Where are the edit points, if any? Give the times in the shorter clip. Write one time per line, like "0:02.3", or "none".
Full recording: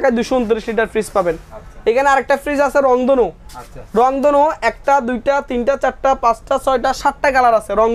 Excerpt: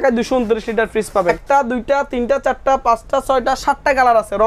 0:01.4